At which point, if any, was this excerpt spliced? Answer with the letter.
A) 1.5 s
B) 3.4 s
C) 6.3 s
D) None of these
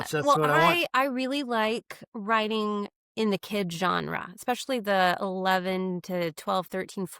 D